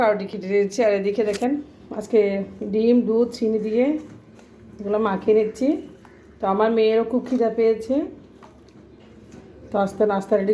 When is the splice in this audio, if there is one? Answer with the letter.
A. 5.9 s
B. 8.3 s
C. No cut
C